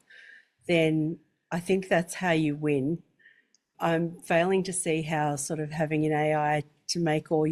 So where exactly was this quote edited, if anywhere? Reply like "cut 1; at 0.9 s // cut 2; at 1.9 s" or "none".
none

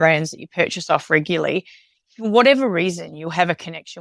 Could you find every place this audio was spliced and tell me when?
none

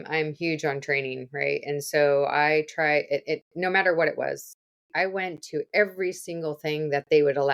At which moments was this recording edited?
cut 1; at 4.6 s

